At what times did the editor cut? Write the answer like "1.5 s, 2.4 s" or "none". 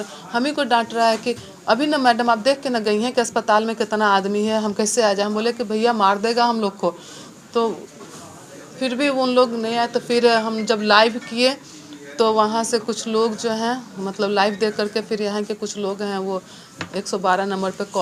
none

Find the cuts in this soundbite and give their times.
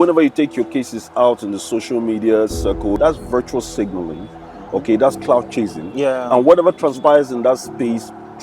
3.0 s

